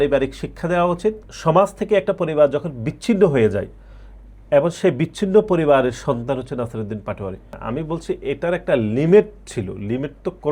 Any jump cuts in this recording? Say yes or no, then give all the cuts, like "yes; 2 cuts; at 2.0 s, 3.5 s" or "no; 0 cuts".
yes; 2 cuts; at 1.3 s, 7.6 s